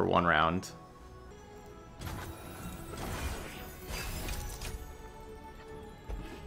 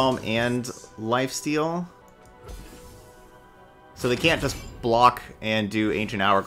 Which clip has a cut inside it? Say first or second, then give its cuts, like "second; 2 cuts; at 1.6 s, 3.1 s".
second; 1 cut; at 2.0 s